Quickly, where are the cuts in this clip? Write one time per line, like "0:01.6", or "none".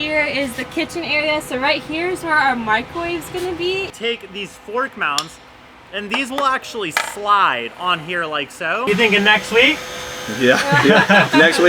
0:03.9
0:08.9